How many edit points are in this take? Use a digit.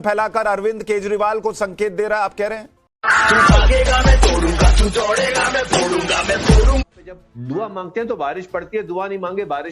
1